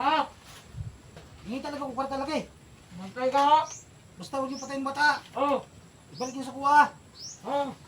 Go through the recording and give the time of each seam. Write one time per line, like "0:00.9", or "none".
0:01.3